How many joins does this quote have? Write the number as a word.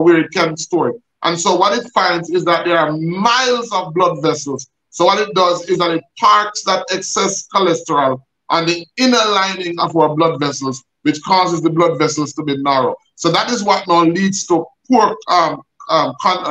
zero